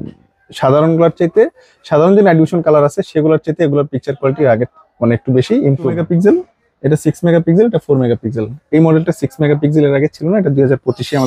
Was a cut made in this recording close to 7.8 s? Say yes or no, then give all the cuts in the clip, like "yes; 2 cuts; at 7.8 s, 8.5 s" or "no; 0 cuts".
no; 1 cut; at 6.0 s